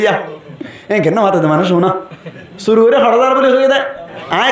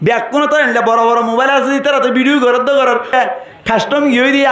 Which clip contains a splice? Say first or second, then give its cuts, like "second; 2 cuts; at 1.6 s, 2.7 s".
second; 1 cut; at 3.1 s